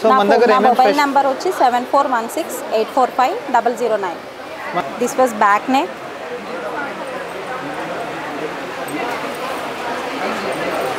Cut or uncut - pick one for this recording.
cut